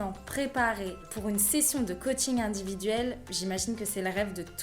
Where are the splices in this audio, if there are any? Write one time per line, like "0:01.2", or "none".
0:01.1